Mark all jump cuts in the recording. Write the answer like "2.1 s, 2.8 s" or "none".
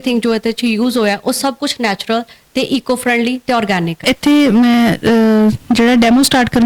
4.0 s